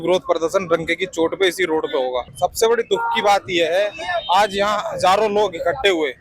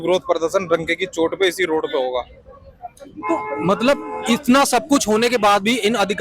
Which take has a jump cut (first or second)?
first